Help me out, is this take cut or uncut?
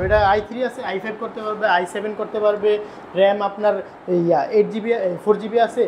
uncut